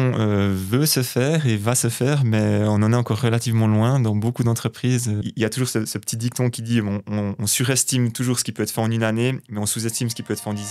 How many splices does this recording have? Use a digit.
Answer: 1